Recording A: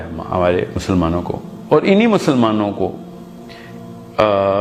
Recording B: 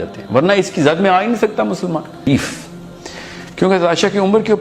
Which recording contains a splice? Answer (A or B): B